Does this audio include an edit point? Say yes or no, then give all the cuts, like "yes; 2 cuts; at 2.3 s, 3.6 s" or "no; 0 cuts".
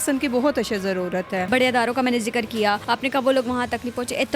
yes; 2 cuts; at 1.5 s, 2.8 s